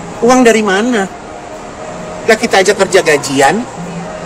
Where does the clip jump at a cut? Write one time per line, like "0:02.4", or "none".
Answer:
none